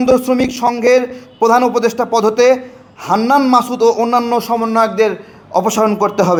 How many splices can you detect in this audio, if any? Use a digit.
0